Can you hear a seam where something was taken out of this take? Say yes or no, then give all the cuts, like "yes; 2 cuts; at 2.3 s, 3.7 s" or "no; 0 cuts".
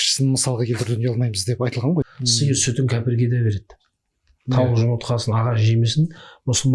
yes; 1 cut; at 2.1 s